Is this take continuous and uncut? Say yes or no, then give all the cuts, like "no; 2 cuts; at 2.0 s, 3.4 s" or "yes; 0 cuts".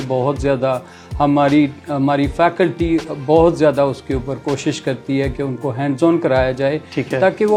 yes; 0 cuts